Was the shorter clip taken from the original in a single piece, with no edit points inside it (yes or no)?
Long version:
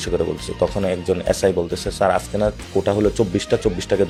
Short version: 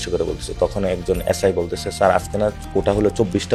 yes